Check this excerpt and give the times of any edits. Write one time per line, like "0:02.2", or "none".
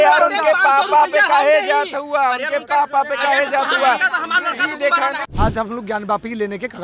0:05.3